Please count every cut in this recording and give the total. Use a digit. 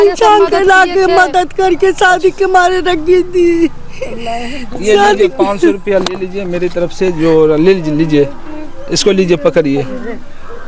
0